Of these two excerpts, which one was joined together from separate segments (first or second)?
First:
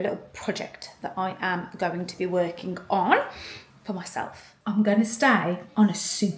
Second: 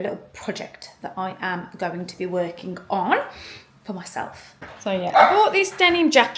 first